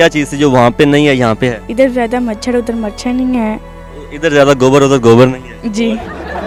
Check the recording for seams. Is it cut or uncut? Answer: uncut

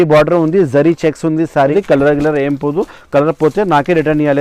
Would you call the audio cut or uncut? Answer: cut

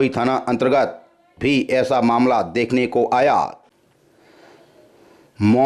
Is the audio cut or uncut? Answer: cut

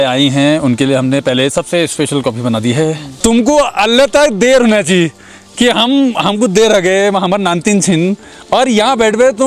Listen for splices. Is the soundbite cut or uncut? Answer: cut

